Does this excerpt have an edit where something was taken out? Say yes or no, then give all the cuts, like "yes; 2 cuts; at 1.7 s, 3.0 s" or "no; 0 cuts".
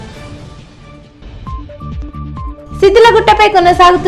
no; 0 cuts